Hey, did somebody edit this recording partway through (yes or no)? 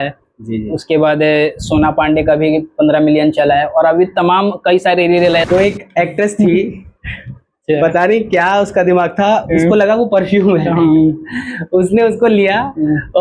yes